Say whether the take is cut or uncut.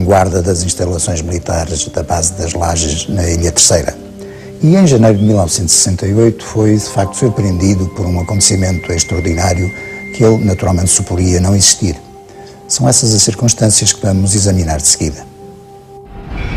uncut